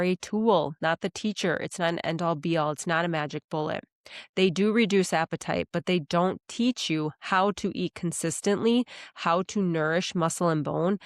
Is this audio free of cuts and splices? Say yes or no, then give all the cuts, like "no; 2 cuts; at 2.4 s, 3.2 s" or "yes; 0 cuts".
yes; 0 cuts